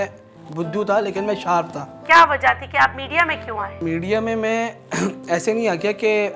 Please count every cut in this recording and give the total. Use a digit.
2